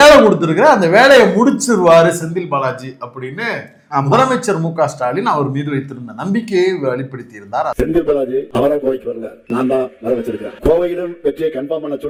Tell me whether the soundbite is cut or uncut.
uncut